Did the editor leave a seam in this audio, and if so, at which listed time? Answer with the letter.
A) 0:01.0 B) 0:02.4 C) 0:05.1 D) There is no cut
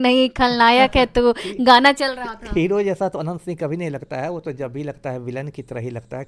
D